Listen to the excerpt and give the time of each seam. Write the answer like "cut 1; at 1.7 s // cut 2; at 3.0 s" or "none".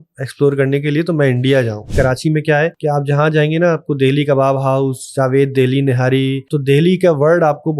cut 1; at 1.9 s // cut 2; at 2.8 s // cut 3; at 6.5 s